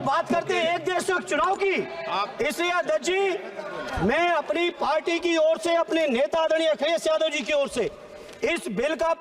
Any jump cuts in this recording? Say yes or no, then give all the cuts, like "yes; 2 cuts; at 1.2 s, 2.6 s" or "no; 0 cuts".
no; 0 cuts